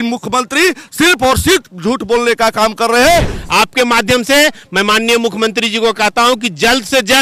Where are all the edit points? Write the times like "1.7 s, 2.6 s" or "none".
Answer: 3.4 s